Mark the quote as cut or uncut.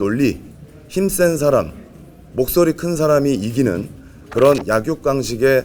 uncut